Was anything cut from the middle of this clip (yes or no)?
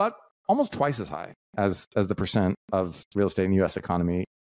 no